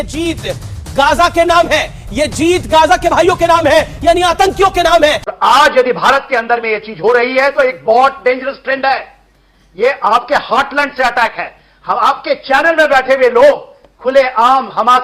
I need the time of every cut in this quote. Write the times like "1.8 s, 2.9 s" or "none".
5.3 s